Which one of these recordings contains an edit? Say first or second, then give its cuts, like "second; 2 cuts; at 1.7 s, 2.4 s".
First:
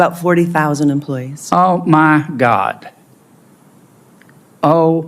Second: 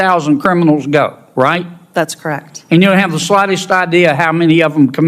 first; 1 cut; at 4.2 s